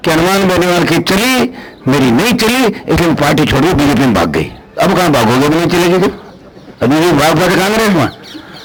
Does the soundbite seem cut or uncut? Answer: uncut